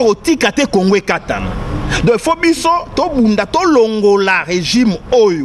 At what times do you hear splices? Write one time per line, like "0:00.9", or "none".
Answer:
none